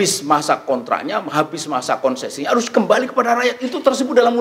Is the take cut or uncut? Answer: uncut